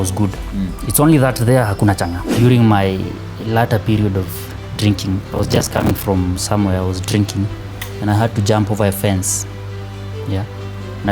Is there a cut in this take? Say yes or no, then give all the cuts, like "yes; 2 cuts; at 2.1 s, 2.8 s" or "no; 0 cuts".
yes; 2 cuts; at 2.2 s, 5.3 s